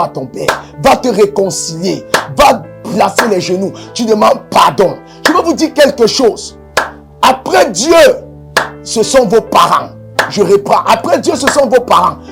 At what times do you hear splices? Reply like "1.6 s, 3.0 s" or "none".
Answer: none